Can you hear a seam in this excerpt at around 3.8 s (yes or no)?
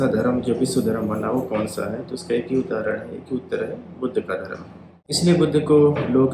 no